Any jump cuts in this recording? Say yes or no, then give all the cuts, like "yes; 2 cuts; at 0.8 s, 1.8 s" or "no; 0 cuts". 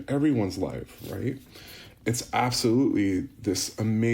yes; 1 cut; at 1.9 s